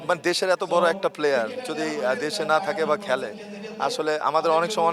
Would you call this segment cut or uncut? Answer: uncut